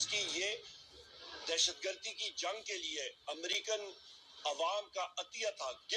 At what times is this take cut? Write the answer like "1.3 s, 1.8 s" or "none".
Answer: none